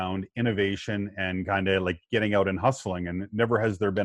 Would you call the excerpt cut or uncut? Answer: uncut